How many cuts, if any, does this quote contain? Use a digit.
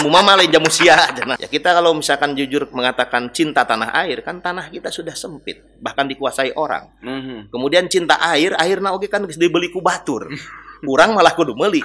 1